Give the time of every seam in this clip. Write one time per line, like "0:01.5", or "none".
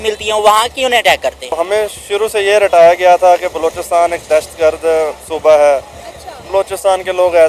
0:01.6